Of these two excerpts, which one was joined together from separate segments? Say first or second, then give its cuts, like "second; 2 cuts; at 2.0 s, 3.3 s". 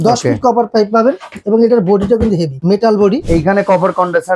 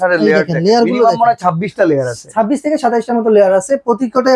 first; 3 cuts; at 1.3 s, 2.5 s, 3.2 s